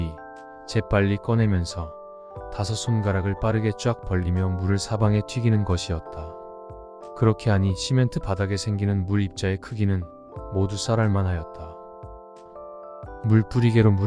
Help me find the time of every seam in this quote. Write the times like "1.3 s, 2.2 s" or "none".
none